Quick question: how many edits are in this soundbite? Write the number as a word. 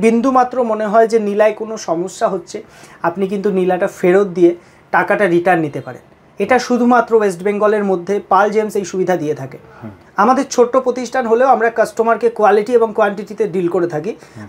zero